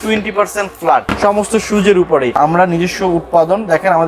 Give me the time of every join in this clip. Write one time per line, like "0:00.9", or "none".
0:01.1
0:02.3